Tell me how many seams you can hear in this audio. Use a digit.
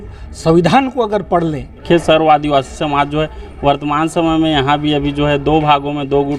1